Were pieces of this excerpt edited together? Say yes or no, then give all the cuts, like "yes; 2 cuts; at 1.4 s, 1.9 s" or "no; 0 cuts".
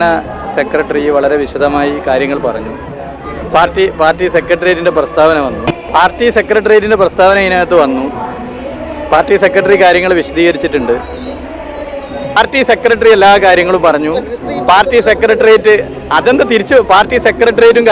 yes; 2 cuts; at 5.7 s, 12.4 s